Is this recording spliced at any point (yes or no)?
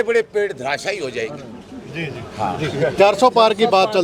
no